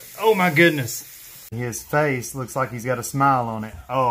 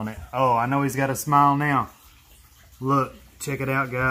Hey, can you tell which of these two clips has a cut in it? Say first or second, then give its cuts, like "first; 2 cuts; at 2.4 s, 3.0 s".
first; 1 cut; at 1.5 s